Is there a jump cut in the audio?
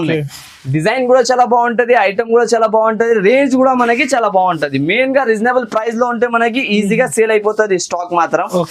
no; 0 cuts

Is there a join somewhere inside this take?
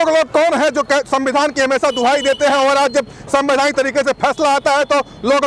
no; 0 cuts

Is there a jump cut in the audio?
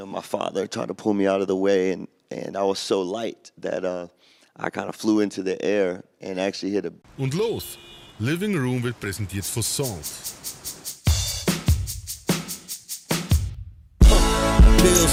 no; 0 cuts

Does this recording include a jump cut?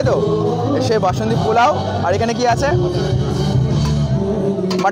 no; 0 cuts

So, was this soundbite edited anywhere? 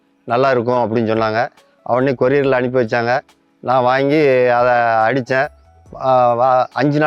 no; 0 cuts

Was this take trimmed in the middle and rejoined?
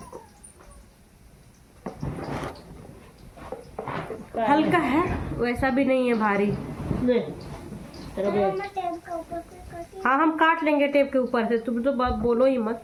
no; 0 cuts

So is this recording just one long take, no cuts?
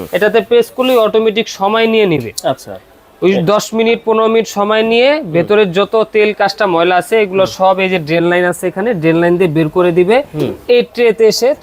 yes; 0 cuts

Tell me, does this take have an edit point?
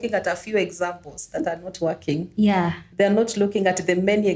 no; 0 cuts

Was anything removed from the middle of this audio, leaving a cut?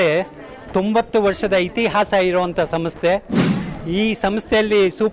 no; 0 cuts

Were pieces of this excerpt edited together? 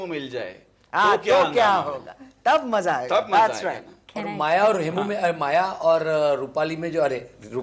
no; 0 cuts

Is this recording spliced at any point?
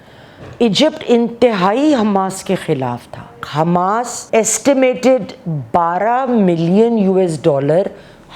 yes; 2 cuts; at 3.4 s, 4.2 s

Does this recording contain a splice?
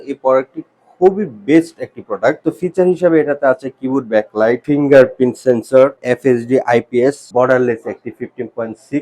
yes; 4 cuts; at 2.4 s, 4.6 s, 6.0 s, 7.2 s

